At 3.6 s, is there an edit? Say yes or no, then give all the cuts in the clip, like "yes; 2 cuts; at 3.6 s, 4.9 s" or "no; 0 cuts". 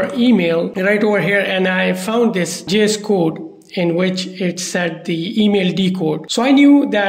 no; 0 cuts